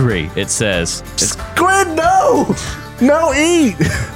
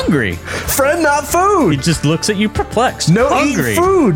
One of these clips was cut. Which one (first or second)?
first